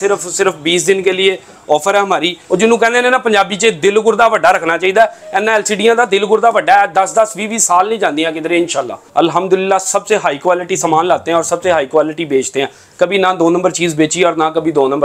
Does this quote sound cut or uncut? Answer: cut